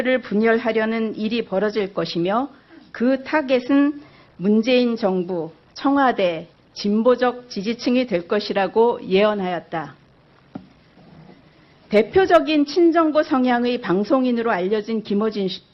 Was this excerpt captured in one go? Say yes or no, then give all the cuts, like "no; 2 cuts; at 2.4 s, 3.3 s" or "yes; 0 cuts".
no; 1 cut; at 13.6 s